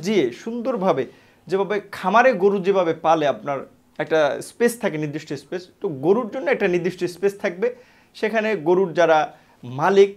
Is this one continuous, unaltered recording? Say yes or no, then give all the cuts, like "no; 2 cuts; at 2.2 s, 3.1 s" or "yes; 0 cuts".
yes; 0 cuts